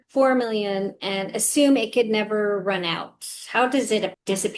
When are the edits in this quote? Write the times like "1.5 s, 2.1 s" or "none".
none